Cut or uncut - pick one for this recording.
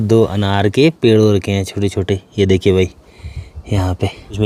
uncut